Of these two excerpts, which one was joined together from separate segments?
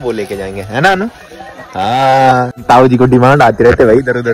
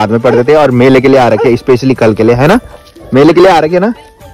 first; 1 cut; at 2.6 s

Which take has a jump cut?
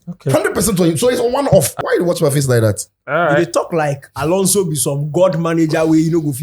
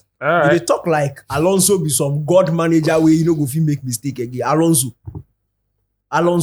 first; 1 cut; at 1.8 s

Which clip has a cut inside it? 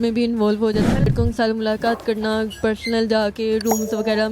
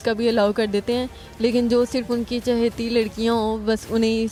first; 1 cut; at 1.1 s

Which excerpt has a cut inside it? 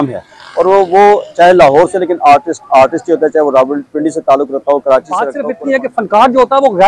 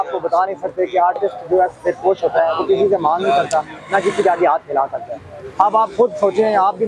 first; 1 cut; at 5.4 s

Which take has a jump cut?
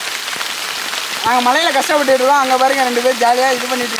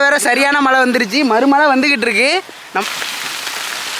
second; 1 cut; at 2.8 s

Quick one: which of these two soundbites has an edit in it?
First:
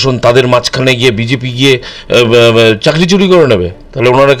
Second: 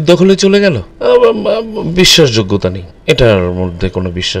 second; 2 cuts; at 0.9 s, 2.9 s

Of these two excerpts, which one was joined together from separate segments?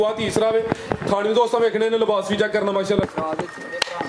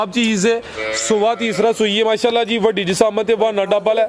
first; 1 cut; at 3.0 s

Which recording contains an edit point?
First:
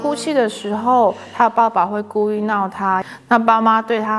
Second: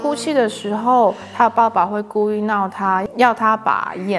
first; 1 cut; at 3.1 s

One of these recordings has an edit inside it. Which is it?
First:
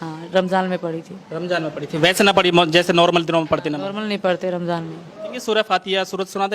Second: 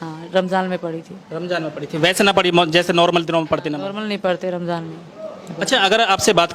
first; 1 cut; at 5.4 s

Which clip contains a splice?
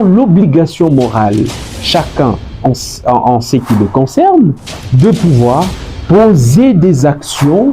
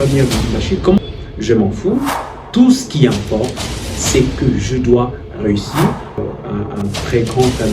second; 2 cuts; at 1.0 s, 6.2 s

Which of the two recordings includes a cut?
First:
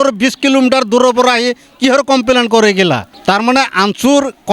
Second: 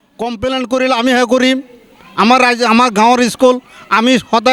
first; 1 cut; at 3.1 s

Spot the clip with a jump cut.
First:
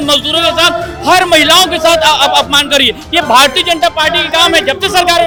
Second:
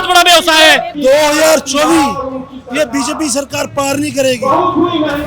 second; 1 cut; at 0.9 s

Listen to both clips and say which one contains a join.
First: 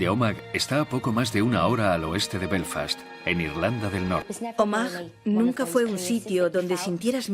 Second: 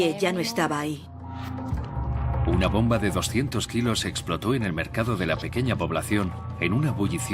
first; 1 cut; at 2.0 s

